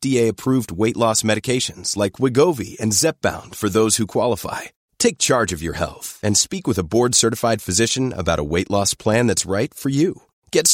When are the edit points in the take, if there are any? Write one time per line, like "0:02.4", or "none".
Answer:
none